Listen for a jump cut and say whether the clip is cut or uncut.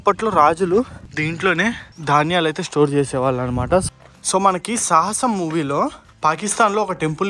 cut